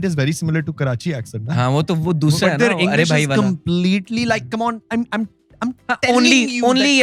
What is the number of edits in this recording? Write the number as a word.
zero